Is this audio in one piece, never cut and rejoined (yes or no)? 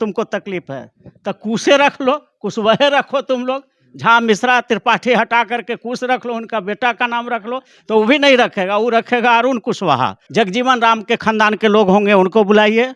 no